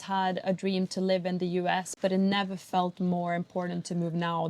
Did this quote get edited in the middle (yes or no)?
no